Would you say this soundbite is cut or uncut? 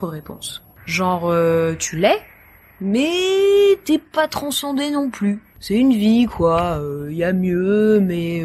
uncut